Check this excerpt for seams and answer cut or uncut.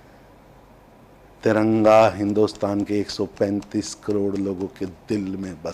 uncut